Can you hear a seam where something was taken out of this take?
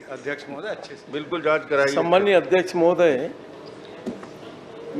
no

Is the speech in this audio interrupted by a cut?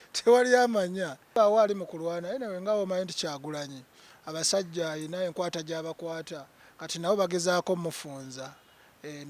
yes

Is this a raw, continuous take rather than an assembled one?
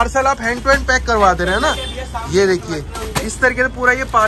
yes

